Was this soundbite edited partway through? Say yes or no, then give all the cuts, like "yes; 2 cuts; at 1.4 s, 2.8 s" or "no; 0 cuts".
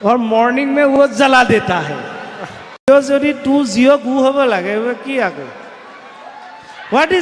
yes; 1 cut; at 2.9 s